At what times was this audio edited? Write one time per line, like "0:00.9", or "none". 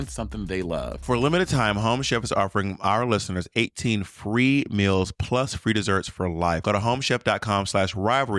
0:01.0
0:06.6